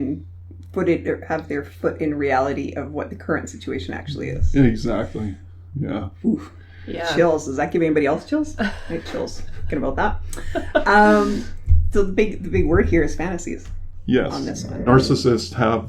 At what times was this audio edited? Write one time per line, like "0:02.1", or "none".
0:14.9